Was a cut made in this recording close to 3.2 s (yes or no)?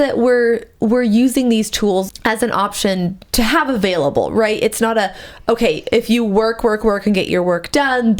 yes